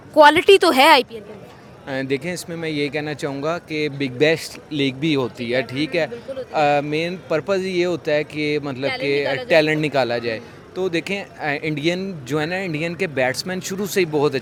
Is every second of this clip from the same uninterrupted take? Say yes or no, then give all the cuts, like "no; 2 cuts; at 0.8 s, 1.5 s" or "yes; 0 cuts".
yes; 0 cuts